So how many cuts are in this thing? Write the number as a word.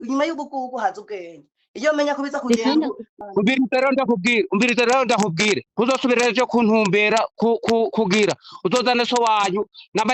one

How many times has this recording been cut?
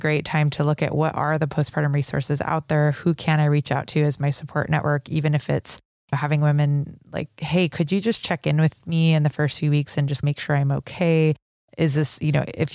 one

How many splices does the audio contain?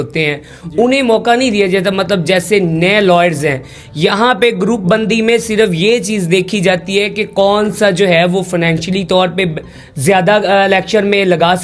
zero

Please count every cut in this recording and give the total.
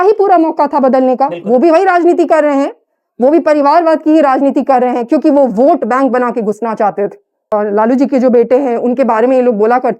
one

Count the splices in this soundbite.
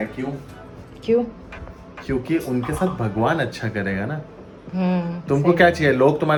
zero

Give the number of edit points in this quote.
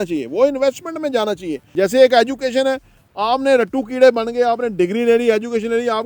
one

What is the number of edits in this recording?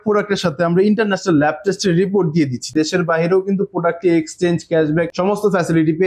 one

